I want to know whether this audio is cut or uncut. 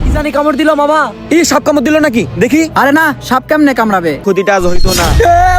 cut